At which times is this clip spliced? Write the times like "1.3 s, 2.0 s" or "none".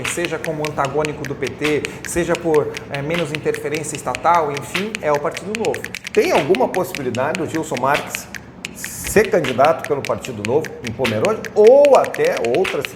5.9 s